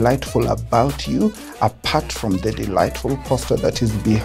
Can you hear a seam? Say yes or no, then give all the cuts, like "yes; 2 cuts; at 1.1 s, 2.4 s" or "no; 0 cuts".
no; 0 cuts